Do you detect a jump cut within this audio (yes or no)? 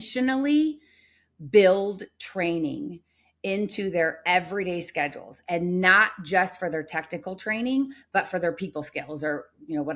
no